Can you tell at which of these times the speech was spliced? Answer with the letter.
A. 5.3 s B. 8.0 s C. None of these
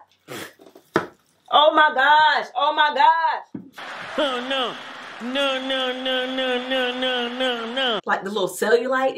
B